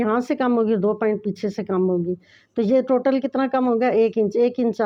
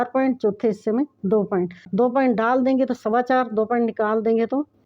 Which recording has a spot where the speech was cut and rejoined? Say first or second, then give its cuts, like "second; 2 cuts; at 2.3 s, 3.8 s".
second; 1 cut; at 1.9 s